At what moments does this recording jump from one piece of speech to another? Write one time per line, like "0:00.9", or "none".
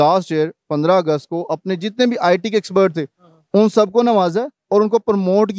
none